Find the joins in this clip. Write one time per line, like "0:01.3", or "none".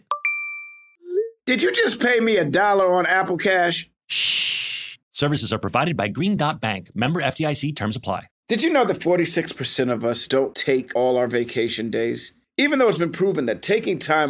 0:08.3